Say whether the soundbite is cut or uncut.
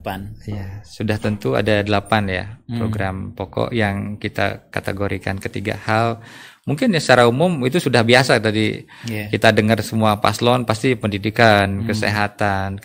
uncut